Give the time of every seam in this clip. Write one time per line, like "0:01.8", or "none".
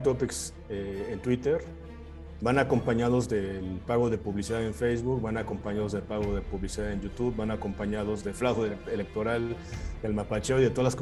none